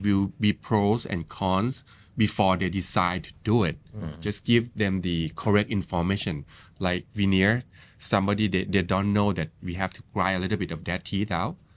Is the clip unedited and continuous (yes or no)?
yes